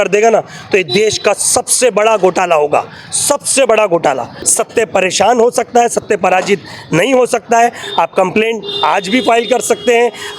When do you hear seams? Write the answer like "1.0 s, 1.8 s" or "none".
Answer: 4.4 s